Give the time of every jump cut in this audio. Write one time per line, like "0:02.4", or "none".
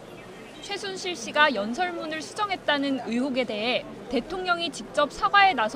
0:01.7